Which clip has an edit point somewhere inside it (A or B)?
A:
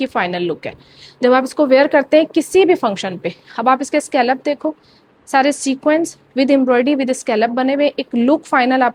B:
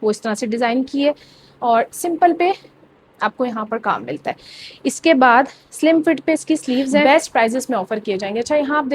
B